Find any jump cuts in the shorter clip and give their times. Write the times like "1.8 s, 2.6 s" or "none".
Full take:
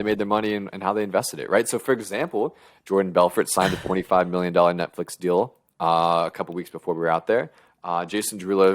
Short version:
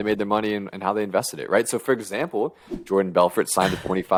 none